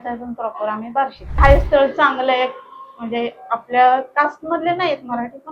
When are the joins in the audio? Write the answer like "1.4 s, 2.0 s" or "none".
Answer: 1.4 s